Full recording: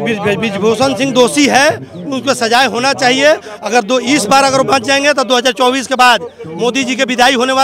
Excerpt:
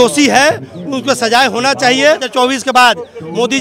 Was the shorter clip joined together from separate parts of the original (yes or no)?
yes